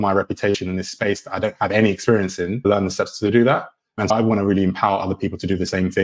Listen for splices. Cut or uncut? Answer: cut